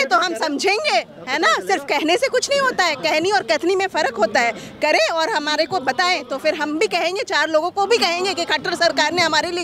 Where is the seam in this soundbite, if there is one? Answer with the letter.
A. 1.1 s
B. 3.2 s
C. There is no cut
C